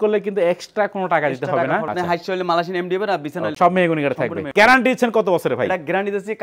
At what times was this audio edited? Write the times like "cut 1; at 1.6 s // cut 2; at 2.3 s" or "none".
cut 1; at 1.9 s // cut 2; at 3.5 s // cut 3; at 4.4 s